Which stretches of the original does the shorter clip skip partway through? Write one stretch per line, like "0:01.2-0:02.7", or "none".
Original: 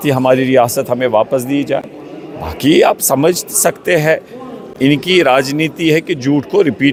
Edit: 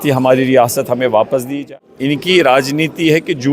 0:01.4-0:04.2